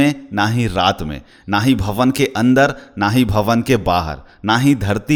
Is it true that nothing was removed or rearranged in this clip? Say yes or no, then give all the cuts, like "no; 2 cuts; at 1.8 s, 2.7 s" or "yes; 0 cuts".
yes; 0 cuts